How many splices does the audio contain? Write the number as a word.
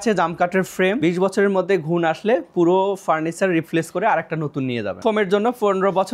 two